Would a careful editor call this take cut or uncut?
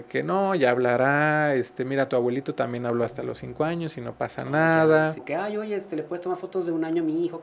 cut